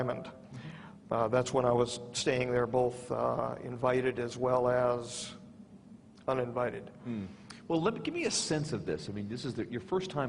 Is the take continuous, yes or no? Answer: yes